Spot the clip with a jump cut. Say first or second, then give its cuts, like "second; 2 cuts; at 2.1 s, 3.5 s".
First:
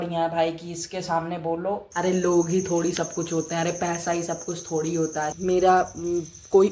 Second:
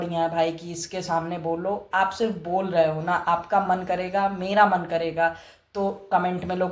first; 2 cuts; at 1.8 s, 5.3 s